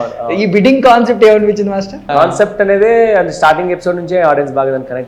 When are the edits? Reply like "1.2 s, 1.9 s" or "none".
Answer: 2.0 s